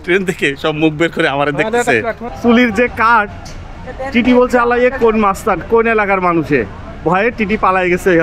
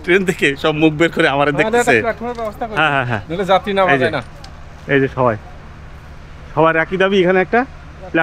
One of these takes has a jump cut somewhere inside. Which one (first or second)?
first